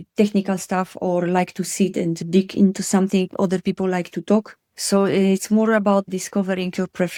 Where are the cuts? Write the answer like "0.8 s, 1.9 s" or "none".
none